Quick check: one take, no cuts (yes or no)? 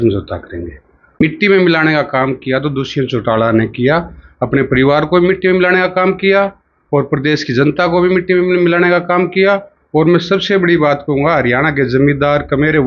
no